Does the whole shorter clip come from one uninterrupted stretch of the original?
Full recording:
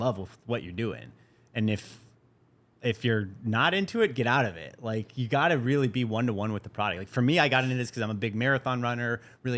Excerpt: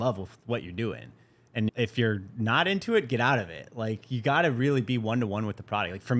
no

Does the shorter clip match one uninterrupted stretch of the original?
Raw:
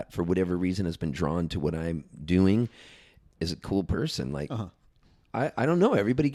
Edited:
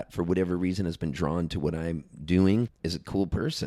no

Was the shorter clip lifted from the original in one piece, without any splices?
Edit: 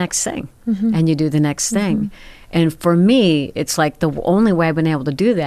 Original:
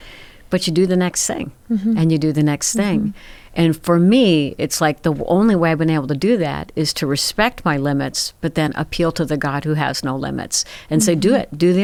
yes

